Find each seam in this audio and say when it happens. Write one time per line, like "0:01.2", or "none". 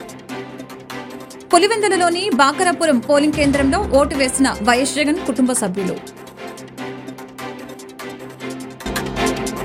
none